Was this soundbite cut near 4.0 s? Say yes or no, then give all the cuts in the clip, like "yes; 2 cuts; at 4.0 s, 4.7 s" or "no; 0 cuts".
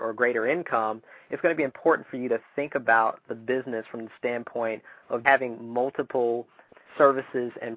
no; 2 cuts; at 5.2 s, 6.7 s